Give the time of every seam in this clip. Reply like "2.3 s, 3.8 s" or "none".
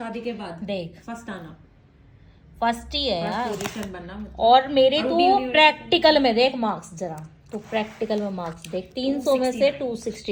none

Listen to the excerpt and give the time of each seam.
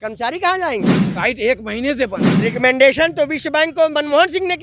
1.0 s, 2.3 s

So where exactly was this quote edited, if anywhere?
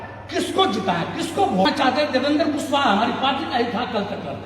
1.7 s

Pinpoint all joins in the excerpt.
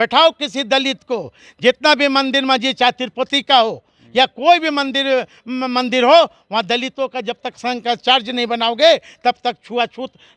none

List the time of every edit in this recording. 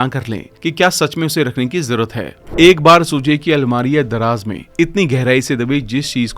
2.4 s

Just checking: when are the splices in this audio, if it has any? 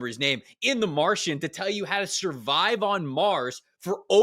none

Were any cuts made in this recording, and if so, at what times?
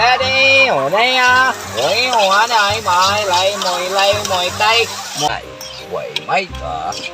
5.3 s

